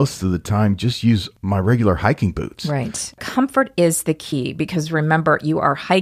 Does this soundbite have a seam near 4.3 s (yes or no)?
no